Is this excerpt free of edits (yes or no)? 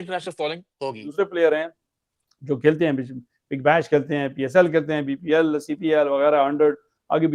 no